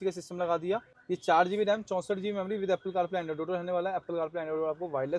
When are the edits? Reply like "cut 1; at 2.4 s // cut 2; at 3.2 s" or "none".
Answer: cut 1; at 0.9 s